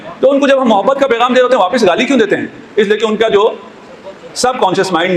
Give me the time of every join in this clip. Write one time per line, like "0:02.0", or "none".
none